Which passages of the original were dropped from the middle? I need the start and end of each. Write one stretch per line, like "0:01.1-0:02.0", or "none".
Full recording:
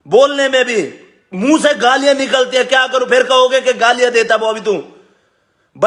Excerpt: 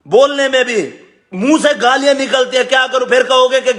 none